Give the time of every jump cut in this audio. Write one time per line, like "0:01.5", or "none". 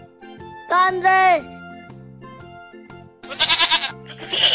0:01.4
0:03.3